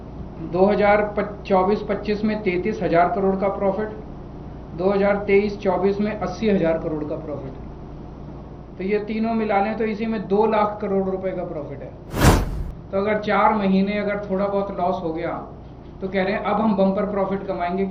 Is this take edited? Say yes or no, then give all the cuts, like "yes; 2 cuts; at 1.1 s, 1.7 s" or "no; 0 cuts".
no; 0 cuts